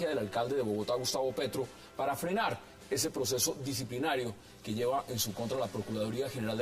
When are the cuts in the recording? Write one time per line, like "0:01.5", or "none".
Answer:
0:02.7